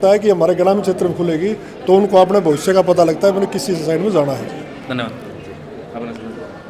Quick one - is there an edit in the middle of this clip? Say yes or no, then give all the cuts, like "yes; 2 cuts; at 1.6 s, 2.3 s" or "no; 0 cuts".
no; 0 cuts